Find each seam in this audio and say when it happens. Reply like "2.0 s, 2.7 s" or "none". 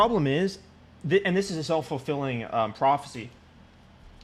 none